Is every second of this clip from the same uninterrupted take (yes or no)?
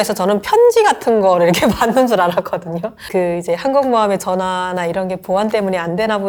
yes